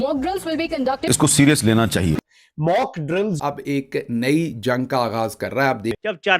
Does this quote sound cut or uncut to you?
cut